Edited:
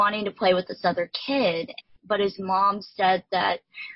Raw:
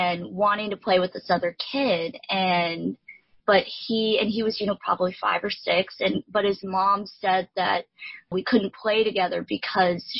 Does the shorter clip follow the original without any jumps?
no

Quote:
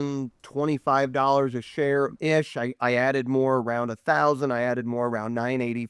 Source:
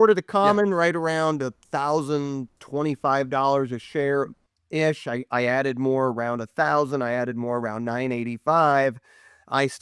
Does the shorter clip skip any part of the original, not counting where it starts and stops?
yes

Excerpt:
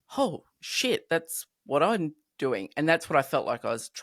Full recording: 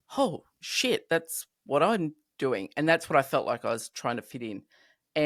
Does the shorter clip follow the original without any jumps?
yes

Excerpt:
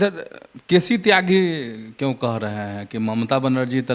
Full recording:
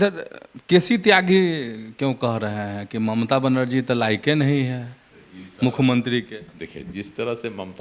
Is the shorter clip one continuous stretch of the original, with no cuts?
yes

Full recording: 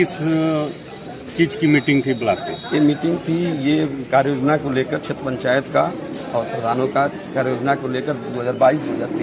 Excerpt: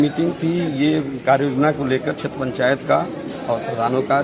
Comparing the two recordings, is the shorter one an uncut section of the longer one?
yes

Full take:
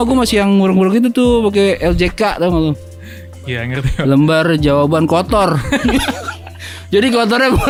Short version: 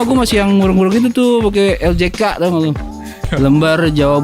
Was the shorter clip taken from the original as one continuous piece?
no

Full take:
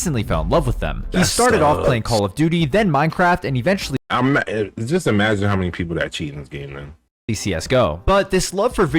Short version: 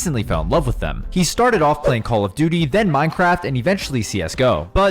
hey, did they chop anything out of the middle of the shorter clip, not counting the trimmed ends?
yes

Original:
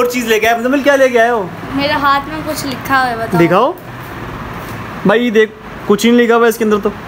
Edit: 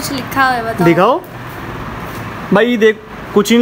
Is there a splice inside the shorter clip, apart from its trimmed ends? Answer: no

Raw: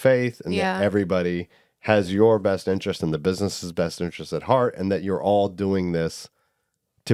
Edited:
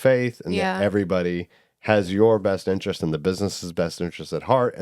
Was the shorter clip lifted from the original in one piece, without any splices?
yes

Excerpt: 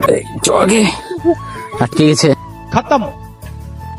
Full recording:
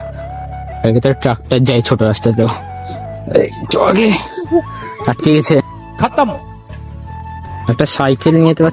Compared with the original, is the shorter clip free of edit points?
yes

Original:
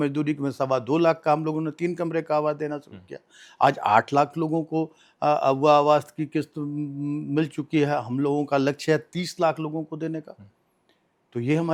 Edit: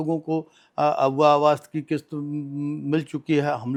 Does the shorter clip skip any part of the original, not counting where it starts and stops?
no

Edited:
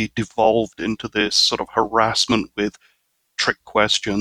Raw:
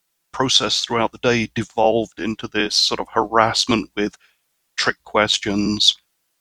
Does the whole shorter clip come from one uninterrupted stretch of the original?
yes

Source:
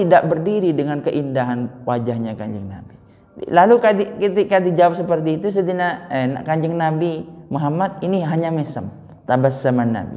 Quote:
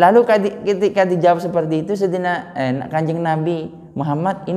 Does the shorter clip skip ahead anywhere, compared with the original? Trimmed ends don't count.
no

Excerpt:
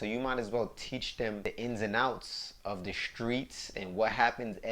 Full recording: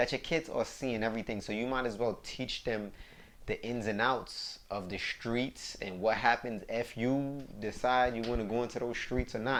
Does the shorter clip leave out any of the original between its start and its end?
yes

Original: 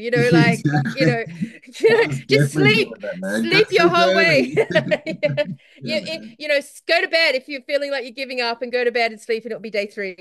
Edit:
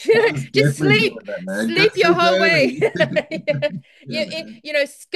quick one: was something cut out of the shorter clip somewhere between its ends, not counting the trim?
no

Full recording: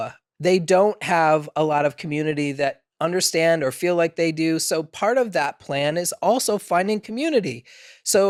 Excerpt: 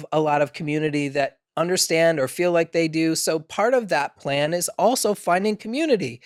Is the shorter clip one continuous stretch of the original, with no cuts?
yes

